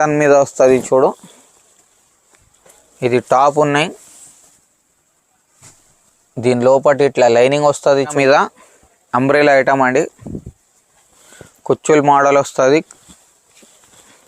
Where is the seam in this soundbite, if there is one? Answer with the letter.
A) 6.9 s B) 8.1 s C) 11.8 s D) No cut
B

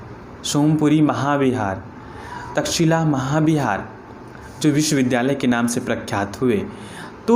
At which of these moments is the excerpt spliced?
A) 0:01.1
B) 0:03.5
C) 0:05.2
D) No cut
D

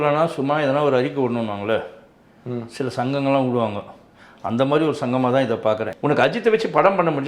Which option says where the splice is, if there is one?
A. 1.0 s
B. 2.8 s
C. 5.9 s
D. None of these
C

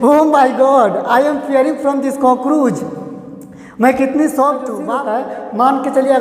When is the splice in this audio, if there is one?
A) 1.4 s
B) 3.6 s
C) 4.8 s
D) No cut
C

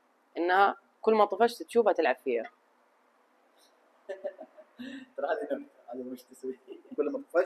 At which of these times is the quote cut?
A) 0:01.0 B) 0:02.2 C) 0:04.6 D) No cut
D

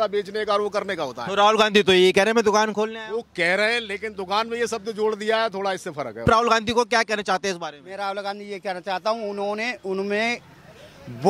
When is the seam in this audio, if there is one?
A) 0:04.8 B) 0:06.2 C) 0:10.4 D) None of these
B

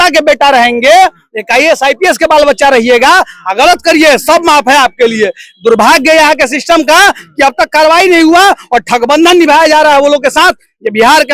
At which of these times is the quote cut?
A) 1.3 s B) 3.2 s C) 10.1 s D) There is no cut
D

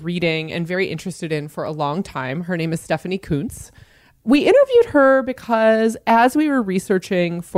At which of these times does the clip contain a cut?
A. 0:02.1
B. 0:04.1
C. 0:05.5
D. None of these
B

